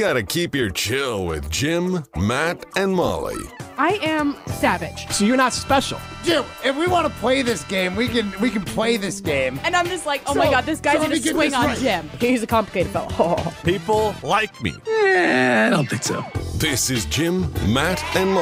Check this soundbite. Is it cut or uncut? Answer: uncut